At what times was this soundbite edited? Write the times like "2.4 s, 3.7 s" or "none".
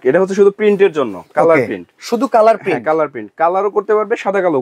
none